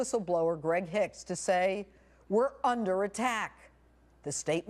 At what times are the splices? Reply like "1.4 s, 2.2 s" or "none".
2.1 s